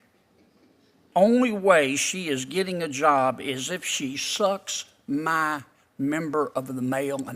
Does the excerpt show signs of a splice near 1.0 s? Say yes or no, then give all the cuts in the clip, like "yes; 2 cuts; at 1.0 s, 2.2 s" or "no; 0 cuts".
yes; 1 cut; at 1.0 s